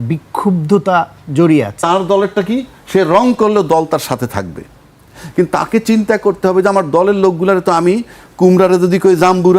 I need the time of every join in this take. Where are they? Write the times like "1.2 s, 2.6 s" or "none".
1.8 s